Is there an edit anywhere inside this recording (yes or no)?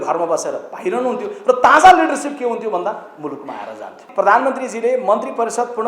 yes